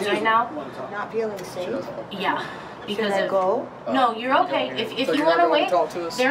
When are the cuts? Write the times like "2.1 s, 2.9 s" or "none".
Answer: none